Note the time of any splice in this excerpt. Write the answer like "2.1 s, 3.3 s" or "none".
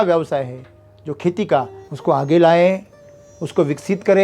1.8 s

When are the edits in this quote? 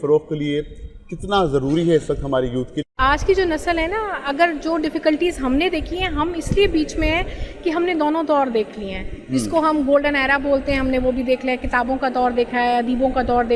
2.9 s

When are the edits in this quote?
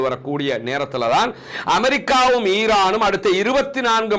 none

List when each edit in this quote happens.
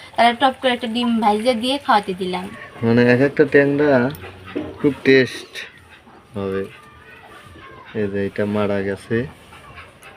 2.5 s

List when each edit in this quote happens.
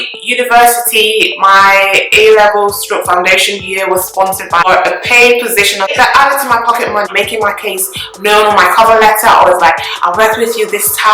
4.6 s, 5.9 s, 7.1 s

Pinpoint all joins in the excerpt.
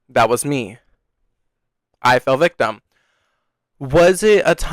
none

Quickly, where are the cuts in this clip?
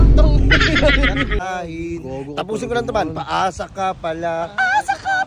1.4 s

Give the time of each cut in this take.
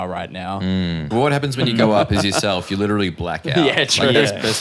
1.1 s

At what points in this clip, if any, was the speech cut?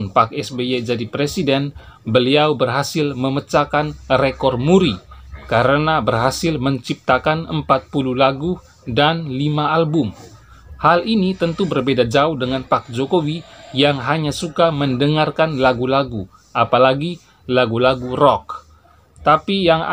none

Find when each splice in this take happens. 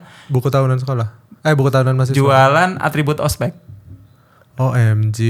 none

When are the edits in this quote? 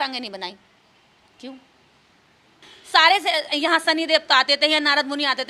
2.7 s

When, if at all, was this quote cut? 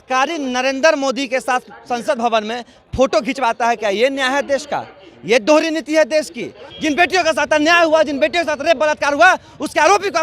6.6 s

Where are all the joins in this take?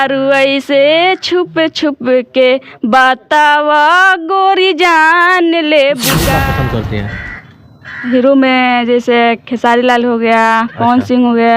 6.2 s

